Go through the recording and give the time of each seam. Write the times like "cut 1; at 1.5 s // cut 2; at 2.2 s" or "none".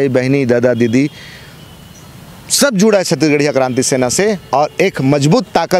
none